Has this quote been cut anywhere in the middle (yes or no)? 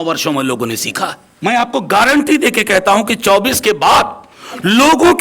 yes